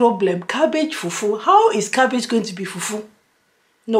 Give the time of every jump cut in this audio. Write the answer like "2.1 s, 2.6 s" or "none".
none

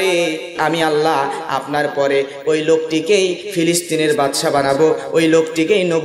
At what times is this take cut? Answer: none

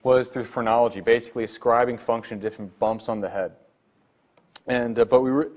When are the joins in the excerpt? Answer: none

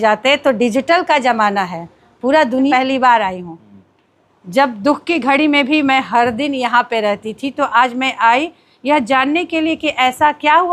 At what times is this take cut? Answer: 2.7 s

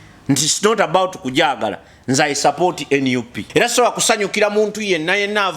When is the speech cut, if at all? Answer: 3.4 s

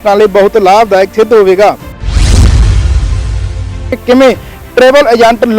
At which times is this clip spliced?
1.9 s, 3.9 s

